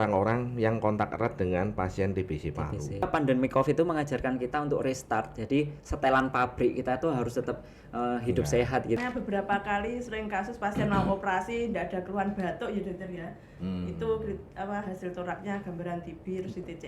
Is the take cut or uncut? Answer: cut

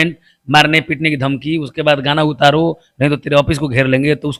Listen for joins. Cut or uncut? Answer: uncut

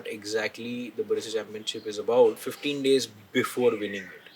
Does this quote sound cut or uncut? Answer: cut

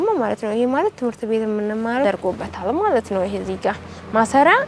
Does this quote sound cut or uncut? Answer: cut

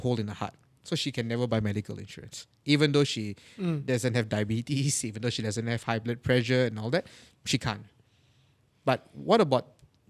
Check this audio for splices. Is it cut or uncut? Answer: uncut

